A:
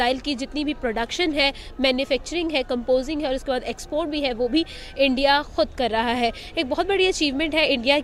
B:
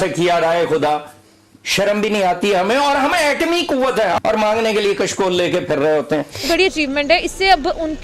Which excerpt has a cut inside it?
B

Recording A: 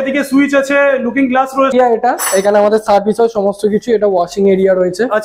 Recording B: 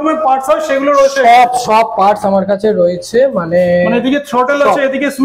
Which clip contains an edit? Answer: A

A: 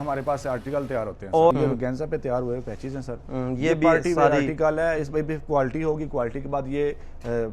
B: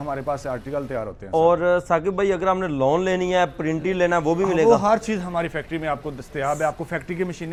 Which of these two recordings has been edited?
A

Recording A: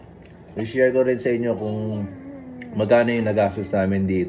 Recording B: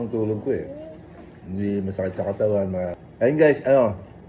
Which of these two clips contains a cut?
B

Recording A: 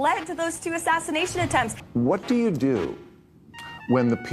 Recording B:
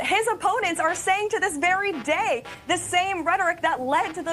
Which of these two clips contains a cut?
A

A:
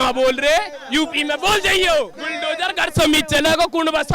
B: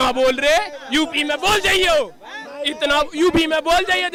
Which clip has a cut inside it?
A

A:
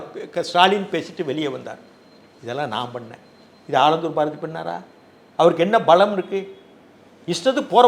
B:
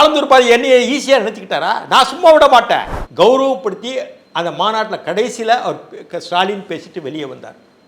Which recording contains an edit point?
B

